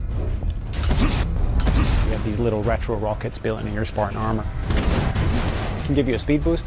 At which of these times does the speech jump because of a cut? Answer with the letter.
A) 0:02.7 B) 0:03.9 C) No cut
B